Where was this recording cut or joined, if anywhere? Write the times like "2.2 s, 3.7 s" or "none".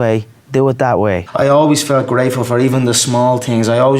1.3 s